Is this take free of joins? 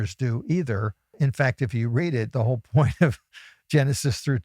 no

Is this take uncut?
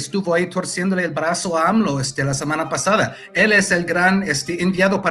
yes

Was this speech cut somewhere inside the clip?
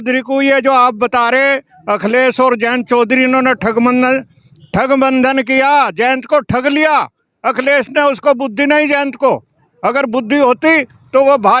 no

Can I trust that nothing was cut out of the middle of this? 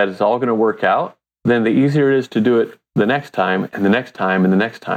no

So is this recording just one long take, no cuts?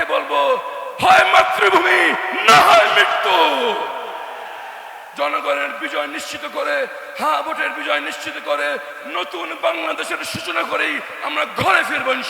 yes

